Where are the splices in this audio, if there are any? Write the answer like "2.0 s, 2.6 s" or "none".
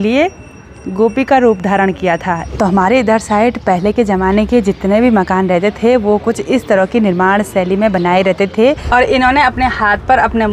2.5 s, 8.8 s

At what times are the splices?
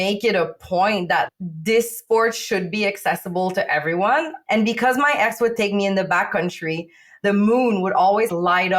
4.4 s

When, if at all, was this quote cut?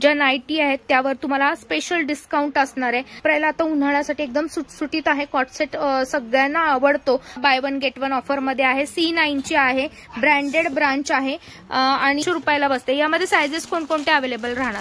3.2 s, 7.4 s, 12.2 s

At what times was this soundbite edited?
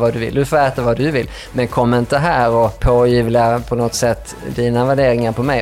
2.8 s

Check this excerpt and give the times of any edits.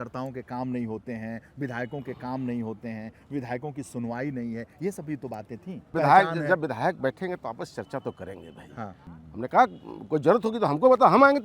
5.9 s, 9.1 s

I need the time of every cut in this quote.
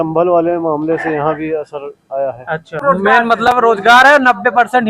2.8 s

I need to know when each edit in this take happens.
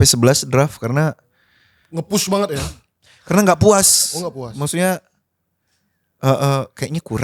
none

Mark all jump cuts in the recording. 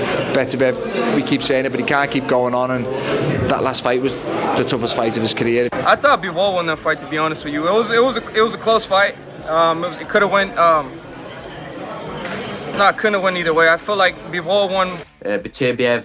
0.9 s, 5.7 s, 15.0 s

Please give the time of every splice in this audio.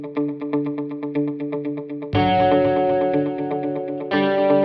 none

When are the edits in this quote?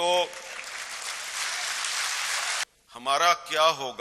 2.6 s

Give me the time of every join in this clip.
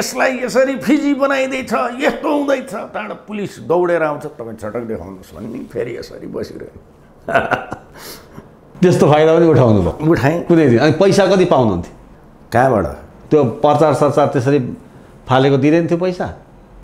none

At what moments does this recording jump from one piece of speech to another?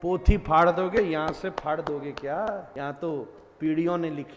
2.7 s

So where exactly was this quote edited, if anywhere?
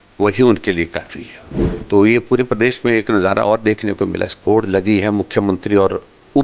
1.2 s, 4.3 s

